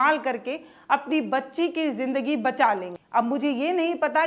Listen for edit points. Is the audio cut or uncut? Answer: cut